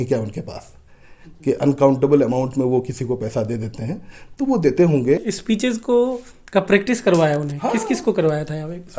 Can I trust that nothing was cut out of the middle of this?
no; 1 cut; at 5.2 s

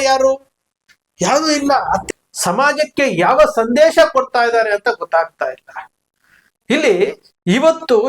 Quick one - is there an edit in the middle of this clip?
yes; 1 cut; at 2.0 s

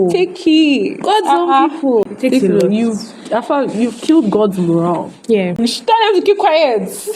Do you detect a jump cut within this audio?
yes; 2 cuts; at 2.1 s, 5.6 s

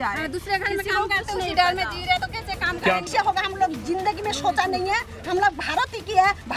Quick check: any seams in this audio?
yes; 1 cut; at 3.1 s

